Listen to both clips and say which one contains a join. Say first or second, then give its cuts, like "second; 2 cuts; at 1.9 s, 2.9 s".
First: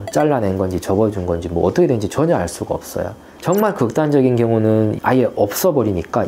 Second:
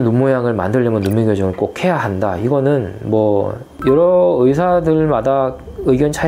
first; 1 cut; at 3.3 s